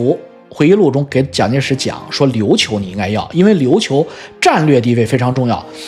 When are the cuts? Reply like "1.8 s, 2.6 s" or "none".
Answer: none